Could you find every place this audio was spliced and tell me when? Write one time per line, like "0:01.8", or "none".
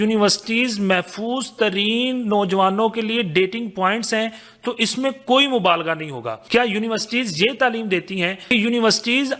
0:06.4
0:08.4